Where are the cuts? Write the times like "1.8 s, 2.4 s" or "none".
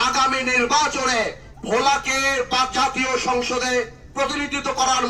none